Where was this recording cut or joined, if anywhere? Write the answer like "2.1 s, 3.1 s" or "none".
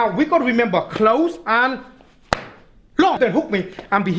3.2 s